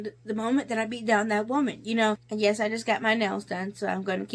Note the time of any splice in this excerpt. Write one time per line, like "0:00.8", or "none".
0:02.3

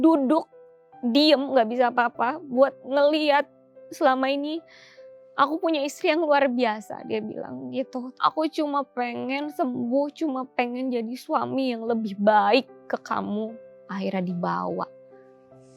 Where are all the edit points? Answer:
0:08.1
0:13.5

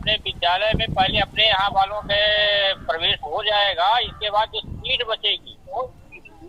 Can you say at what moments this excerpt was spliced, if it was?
none

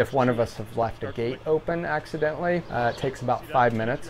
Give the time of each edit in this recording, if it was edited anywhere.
0:02.7

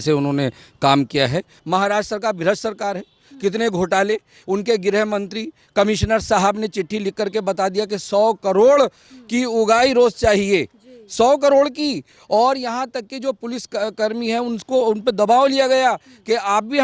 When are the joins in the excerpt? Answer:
0:01.5

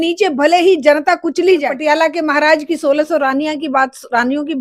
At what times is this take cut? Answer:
0:01.7

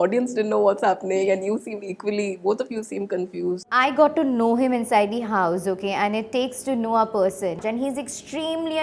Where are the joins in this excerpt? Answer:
0:03.7
0:07.6

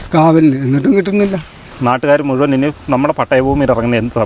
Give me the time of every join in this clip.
0:01.7

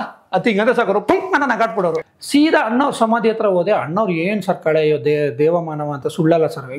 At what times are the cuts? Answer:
0:02.1

